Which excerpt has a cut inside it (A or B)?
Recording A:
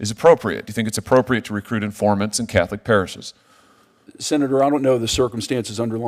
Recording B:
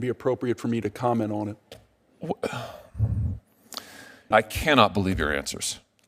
B